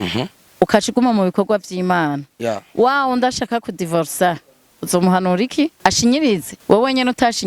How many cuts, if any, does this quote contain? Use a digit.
2